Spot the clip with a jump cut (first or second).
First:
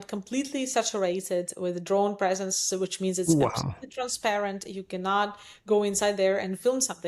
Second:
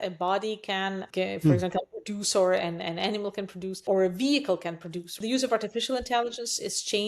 second